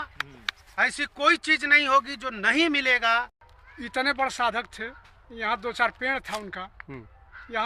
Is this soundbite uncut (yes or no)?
no